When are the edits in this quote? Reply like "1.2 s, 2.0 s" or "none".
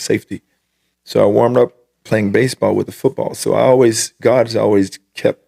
none